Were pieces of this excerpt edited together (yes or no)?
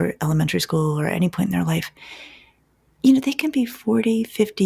no